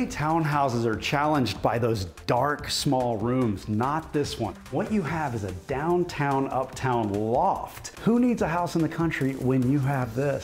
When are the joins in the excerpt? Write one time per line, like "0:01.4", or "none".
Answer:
0:04.6
0:07.8